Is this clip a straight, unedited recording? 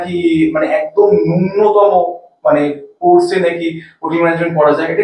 yes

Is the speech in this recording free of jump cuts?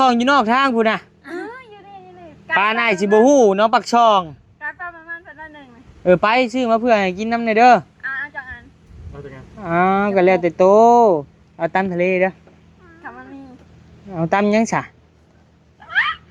yes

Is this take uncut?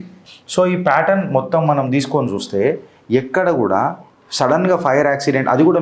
yes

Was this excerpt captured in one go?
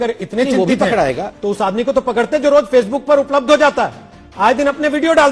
yes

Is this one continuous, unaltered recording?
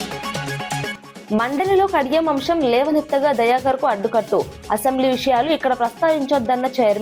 no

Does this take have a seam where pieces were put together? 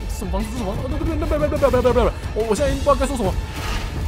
no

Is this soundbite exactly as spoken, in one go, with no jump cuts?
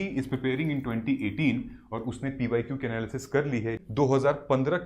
no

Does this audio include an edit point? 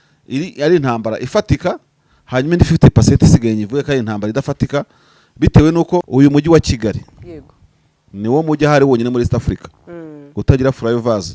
yes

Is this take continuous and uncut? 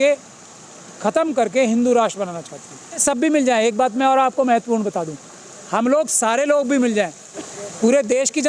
no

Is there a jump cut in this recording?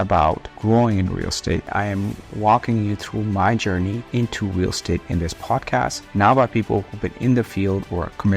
yes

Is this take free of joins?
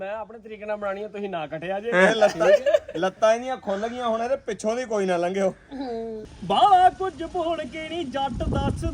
no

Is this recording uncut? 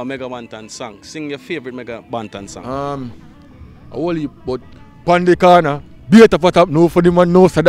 yes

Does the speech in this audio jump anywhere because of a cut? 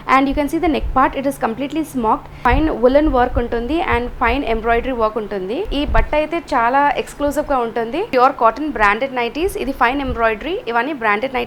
yes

